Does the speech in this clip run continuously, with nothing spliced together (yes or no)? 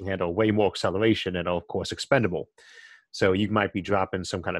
yes